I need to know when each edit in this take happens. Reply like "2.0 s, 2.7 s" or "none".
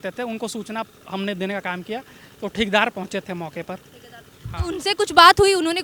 none